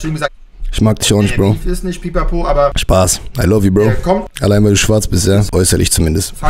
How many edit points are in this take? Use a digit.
3